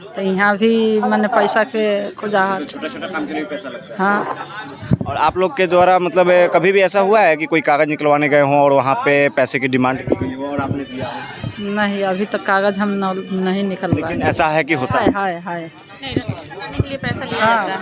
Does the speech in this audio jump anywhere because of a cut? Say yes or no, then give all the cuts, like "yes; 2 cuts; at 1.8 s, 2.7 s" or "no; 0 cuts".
no; 0 cuts